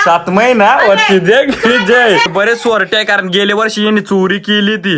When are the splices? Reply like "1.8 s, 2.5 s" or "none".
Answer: 2.3 s